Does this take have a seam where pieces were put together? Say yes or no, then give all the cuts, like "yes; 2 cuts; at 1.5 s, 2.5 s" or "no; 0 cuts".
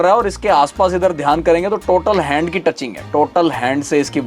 no; 0 cuts